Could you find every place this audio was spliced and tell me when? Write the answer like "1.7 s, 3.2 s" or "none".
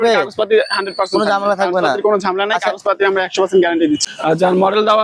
4.1 s